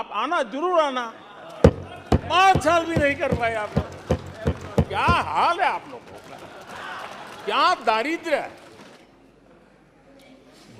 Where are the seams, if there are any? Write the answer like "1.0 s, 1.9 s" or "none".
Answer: 9.0 s